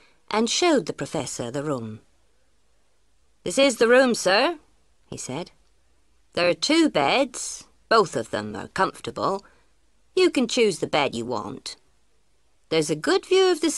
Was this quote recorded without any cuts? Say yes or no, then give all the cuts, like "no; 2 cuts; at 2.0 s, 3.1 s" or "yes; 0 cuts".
yes; 0 cuts